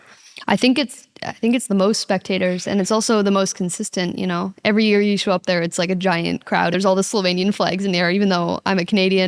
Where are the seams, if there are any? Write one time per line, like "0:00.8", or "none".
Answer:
0:06.7